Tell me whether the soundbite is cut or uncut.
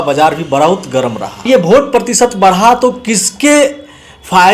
cut